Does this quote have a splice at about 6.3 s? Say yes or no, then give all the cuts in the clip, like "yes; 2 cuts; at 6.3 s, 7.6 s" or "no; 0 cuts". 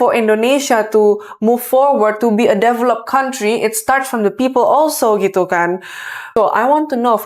yes; 1 cut; at 6.3 s